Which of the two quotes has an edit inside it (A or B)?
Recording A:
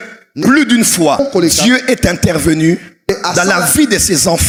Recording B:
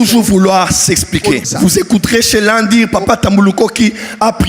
B